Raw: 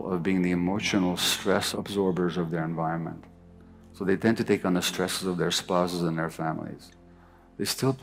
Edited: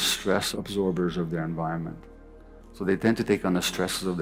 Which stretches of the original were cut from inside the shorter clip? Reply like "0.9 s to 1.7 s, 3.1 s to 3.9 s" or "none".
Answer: none